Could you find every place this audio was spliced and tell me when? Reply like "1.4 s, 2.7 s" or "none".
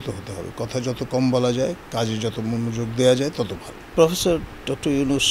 3.9 s